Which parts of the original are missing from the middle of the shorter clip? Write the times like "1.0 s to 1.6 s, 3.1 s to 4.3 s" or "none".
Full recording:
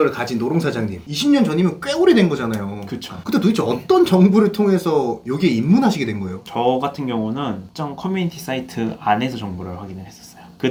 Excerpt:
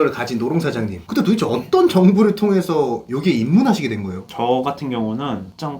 0.9 s to 3.1 s